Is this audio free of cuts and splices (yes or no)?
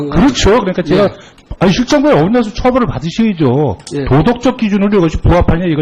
yes